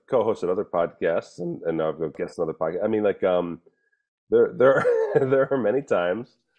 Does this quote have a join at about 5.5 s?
no; 1 cut; at 2.1 s

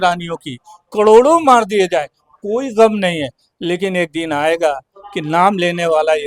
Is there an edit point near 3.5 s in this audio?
no; 0 cuts

